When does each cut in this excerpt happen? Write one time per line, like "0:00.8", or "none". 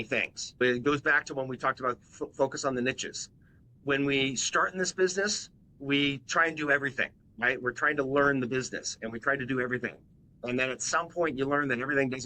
0:03.8